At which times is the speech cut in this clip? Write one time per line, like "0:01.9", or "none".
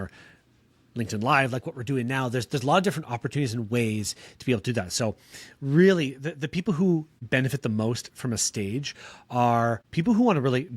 0:07.1
0:09.8